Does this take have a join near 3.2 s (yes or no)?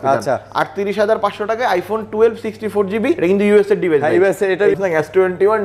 yes